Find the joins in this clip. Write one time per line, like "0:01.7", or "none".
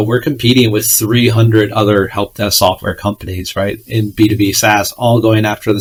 none